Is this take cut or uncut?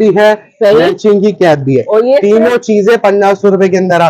uncut